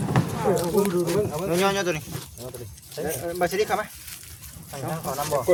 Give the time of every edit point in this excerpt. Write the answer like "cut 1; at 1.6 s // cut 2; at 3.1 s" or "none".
none